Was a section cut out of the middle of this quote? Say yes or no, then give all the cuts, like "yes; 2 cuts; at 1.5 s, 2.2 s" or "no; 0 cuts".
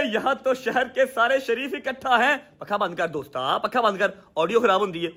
no; 0 cuts